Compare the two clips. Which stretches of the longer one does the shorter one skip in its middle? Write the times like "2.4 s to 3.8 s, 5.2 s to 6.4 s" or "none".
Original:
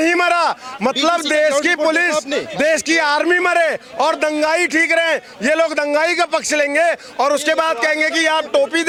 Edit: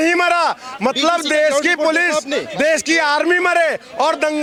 none